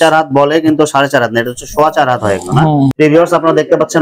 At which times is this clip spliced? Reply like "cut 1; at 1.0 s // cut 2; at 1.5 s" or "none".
cut 1; at 2.9 s